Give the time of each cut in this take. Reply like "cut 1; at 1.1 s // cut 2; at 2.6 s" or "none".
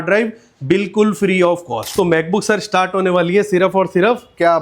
cut 1; at 1.9 s